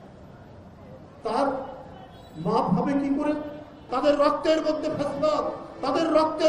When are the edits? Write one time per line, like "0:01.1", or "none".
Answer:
0:03.7